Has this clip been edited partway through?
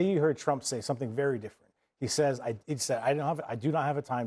no; 0 cuts

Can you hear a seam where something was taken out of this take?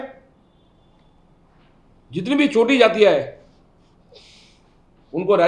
no; 0 cuts

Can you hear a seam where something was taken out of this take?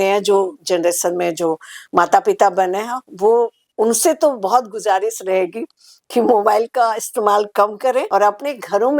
yes; 1 cut; at 8.1 s

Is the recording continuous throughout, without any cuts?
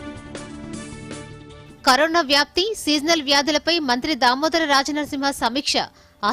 no; 1 cut; at 1.6 s

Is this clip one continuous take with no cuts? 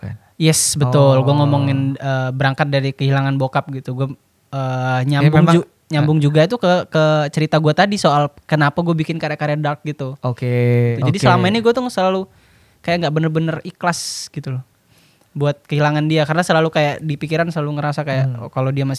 no; 1 cut; at 11.0 s

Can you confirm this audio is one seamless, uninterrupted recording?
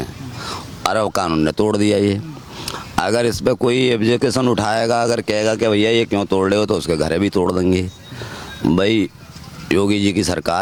yes; 0 cuts

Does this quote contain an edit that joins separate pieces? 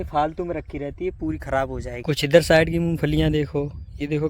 yes; 1 cut; at 2.0 s

